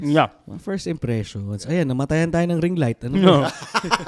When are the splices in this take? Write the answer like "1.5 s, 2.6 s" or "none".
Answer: none

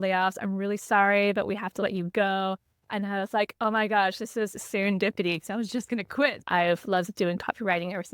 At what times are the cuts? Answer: 6.4 s

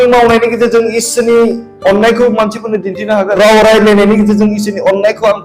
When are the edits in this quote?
3.4 s

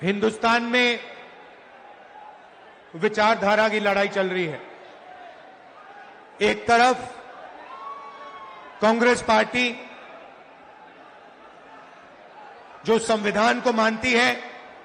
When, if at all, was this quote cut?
none

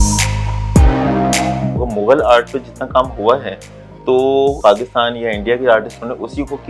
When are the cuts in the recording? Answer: 1.8 s, 4.6 s

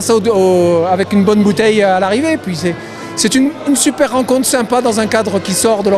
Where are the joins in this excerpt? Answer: none

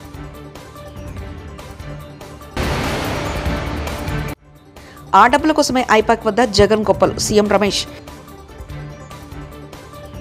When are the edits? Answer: 2.5 s

